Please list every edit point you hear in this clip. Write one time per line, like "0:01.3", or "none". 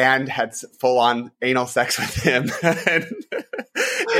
none